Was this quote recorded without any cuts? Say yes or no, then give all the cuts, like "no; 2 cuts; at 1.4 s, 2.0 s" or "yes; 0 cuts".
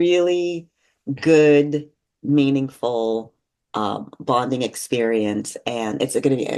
yes; 0 cuts